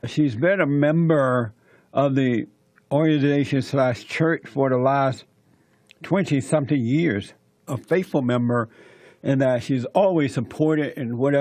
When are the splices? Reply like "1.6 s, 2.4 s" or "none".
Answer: 9.8 s